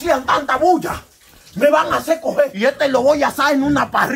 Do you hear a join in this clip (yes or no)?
yes